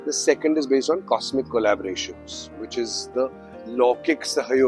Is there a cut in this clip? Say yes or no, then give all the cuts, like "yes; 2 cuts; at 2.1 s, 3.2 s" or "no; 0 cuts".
no; 0 cuts